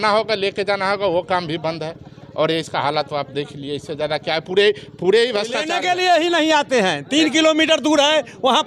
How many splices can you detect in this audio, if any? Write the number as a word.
one